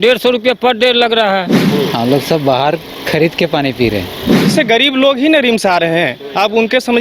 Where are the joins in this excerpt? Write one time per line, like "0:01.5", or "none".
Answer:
0:01.6
0:04.4